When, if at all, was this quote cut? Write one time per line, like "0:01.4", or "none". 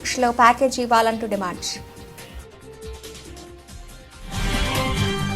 0:01.6